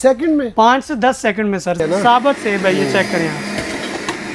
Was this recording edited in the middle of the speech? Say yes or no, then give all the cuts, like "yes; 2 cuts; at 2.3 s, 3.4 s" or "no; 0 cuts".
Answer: yes; 1 cut; at 1.8 s